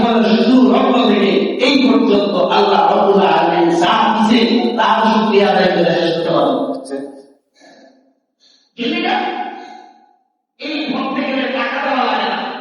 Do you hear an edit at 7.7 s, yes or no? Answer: yes